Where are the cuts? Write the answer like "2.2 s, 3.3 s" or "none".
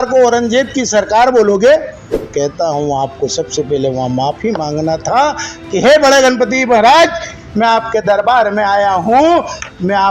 2.2 s